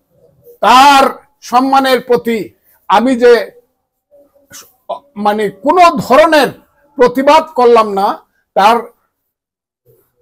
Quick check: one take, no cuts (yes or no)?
yes